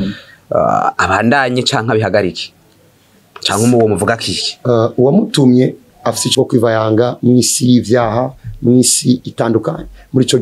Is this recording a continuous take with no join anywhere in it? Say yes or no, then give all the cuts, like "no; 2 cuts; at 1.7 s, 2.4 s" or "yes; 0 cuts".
no; 1 cut; at 6.2 s